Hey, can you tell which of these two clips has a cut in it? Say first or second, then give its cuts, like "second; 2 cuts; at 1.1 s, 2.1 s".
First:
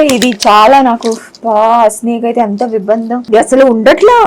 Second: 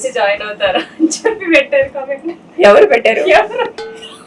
first; 1 cut; at 3.2 s